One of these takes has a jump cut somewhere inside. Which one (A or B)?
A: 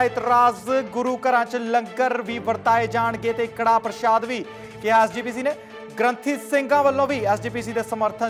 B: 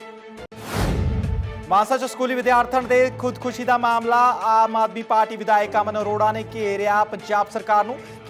B